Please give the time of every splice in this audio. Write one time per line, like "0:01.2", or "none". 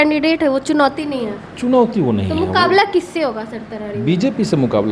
none